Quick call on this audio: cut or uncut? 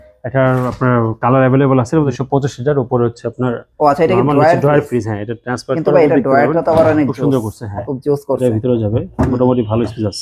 cut